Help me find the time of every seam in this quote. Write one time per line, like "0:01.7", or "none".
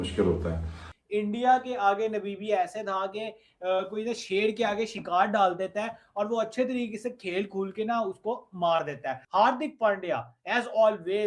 0:00.9
0:09.2